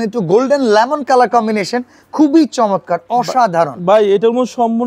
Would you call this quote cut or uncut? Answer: uncut